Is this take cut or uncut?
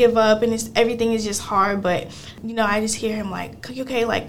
cut